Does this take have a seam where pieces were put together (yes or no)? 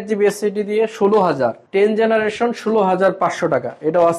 yes